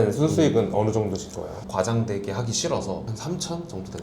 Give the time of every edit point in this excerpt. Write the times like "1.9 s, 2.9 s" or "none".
1.6 s, 3.1 s